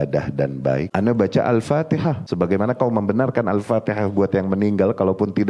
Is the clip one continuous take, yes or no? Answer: no